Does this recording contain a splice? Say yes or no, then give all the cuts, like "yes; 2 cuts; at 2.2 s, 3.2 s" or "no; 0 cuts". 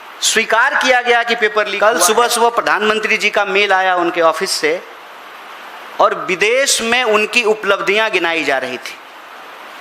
yes; 1 cut; at 1.7 s